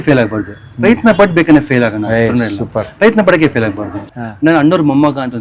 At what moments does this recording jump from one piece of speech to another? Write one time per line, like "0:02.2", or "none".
0:04.0